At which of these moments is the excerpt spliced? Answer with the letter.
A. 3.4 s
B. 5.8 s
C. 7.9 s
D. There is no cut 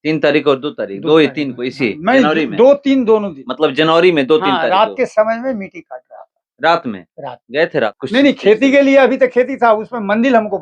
C